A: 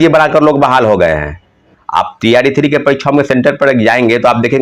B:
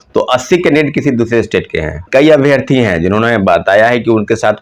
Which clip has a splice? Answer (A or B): B